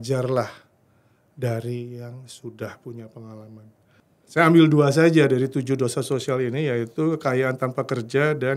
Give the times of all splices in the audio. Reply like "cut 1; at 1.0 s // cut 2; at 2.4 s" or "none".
cut 1; at 3.8 s